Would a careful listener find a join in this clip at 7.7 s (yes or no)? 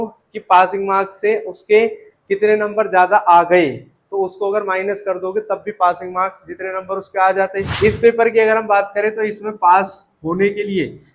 yes